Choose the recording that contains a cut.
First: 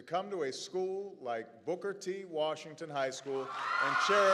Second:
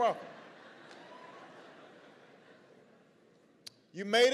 first; 1 cut; at 2.0 s

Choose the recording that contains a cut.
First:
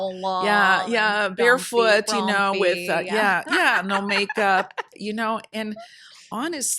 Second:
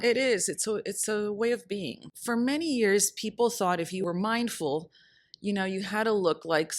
second; 2 cuts; at 2.0 s, 4.0 s

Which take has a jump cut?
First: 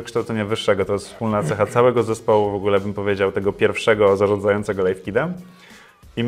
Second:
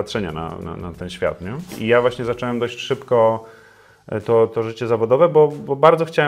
second; 1 cut; at 1.8 s

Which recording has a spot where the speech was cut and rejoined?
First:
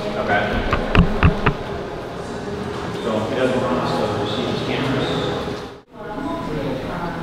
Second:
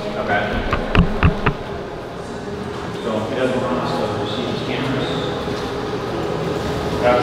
first; 1 cut; at 5.8 s

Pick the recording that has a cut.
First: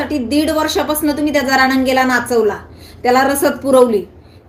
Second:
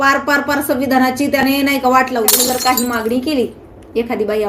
second; 1 cut; at 2.3 s

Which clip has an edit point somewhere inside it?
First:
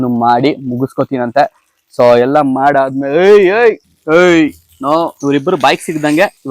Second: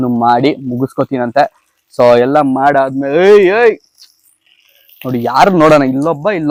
first; 2 cuts; at 3.9 s, 5.2 s

